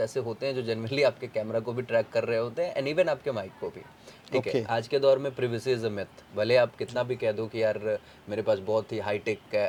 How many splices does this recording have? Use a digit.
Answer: 0